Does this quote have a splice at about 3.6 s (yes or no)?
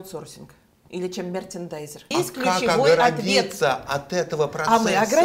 no